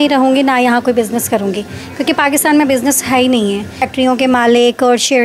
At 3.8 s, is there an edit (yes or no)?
yes